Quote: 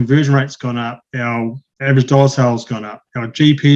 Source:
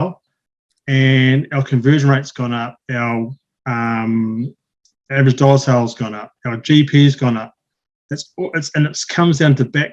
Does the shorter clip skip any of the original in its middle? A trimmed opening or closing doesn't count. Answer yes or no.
yes